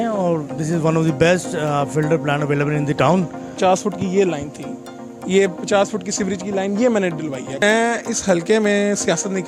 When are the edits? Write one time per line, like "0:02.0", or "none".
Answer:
0:03.5
0:07.6